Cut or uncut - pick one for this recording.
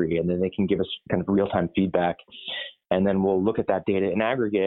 uncut